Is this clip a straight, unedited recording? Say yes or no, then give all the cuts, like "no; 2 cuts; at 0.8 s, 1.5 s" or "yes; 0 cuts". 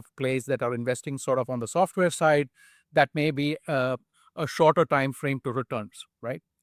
yes; 0 cuts